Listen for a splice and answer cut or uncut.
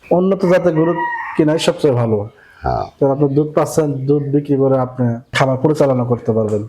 cut